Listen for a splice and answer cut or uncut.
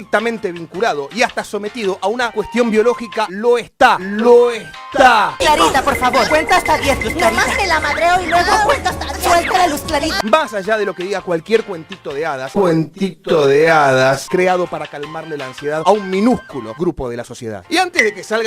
uncut